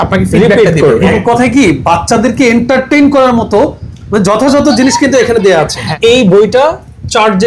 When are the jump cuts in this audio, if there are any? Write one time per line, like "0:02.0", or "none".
0:01.1
0:05.9

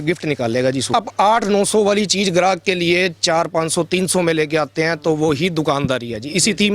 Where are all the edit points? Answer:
0:00.9

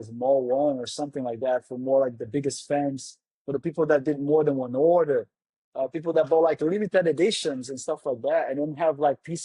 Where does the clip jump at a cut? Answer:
none

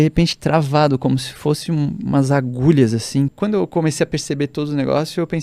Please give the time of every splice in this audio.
0:03.3

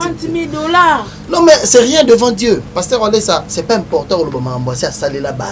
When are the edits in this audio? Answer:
0:02.7
0:03.5

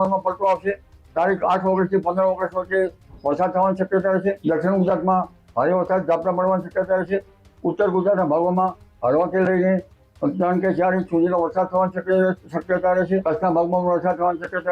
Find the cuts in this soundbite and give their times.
0:04.4
0:13.2

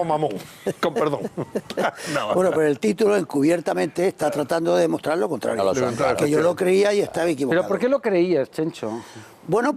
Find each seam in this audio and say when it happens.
0:03.4

